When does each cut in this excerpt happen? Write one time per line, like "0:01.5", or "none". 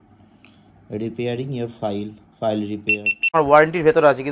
0:03.3

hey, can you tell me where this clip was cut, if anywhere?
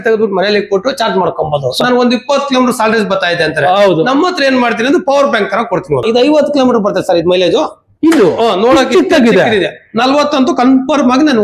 0:01.8
0:06.0

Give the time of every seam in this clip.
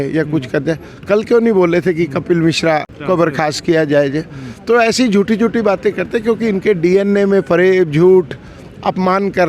0:02.9

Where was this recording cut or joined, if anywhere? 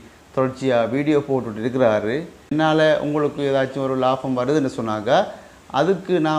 0:02.5

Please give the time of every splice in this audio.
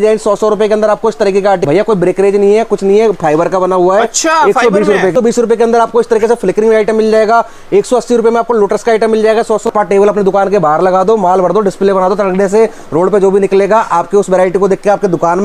0:01.6
0:05.1
0:09.7

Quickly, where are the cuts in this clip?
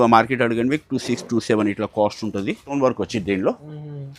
0:02.7

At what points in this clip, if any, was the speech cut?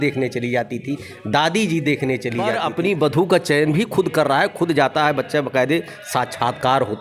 0:02.6

